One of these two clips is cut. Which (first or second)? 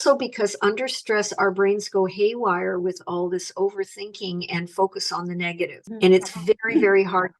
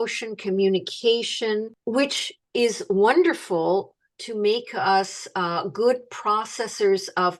first